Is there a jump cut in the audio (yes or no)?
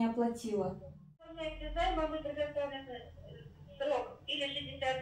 yes